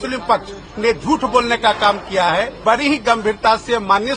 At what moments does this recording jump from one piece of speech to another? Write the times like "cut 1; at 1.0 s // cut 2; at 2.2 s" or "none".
cut 1; at 2.6 s